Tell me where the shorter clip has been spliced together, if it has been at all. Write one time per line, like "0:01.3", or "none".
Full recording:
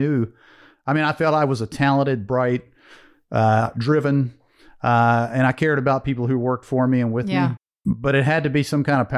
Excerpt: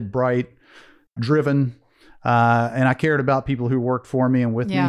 0:01.1